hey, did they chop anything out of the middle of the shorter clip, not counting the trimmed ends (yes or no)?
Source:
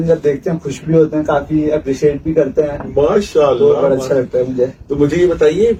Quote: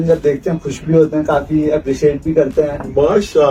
no